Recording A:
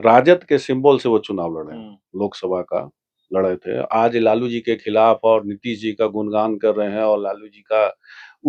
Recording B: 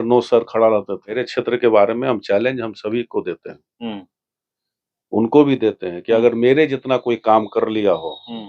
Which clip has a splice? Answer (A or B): B